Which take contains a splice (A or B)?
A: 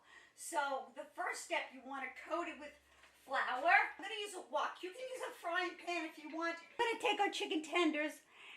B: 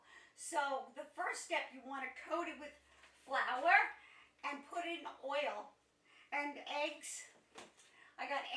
A